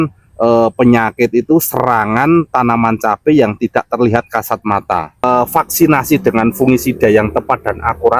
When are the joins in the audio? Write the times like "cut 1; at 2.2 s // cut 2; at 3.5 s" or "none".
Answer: cut 1; at 5.2 s